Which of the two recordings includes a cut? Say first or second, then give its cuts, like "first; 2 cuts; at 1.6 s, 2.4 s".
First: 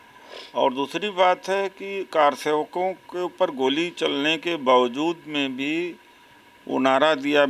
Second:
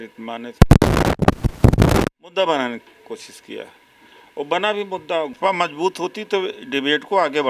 second; 1 cut; at 5.3 s